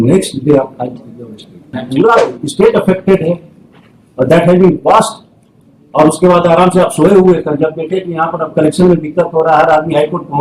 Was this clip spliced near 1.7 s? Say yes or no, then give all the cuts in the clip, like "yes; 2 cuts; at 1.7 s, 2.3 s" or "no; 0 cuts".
yes; 1 cut; at 1.7 s